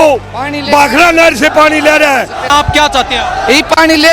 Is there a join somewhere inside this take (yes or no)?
yes